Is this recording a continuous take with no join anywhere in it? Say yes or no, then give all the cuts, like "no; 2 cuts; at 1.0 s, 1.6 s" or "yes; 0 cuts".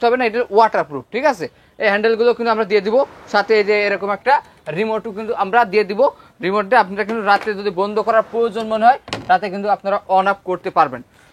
yes; 0 cuts